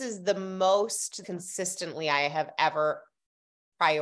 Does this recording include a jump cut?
yes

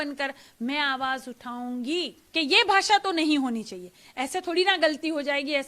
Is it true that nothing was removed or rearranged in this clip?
no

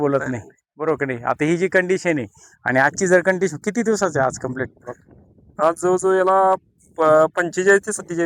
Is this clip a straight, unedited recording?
yes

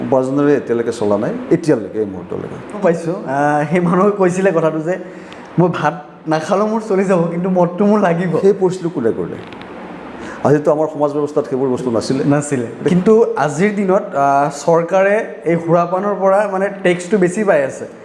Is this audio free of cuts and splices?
no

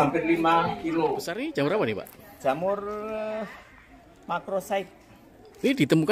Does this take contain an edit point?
yes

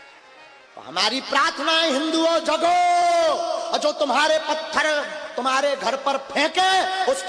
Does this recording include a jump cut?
no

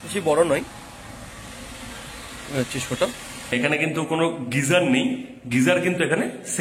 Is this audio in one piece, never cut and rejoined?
no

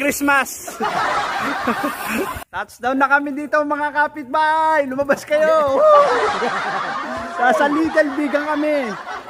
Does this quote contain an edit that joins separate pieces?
yes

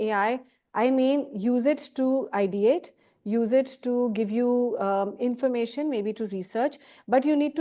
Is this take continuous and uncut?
yes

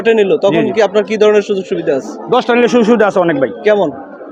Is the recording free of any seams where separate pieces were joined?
yes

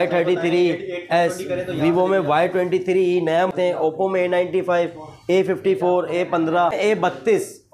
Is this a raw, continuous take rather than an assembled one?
no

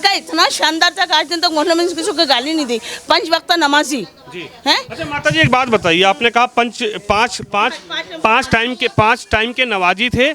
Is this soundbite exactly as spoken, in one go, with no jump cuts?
yes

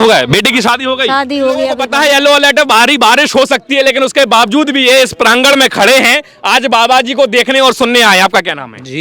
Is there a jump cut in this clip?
yes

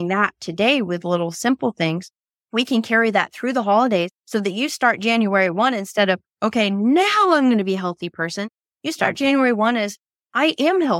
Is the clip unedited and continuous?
yes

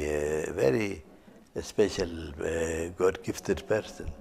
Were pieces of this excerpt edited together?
no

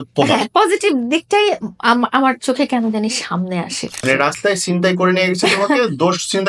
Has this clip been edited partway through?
yes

